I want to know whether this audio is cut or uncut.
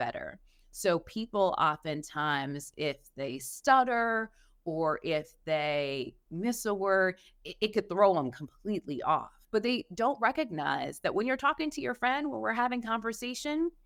uncut